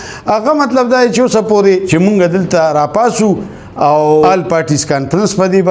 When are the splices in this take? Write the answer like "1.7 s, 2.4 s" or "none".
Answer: 1.9 s, 4.3 s